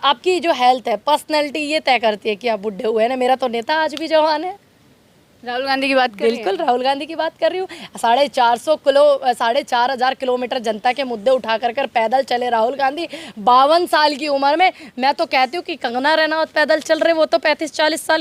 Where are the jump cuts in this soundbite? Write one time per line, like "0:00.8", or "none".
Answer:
none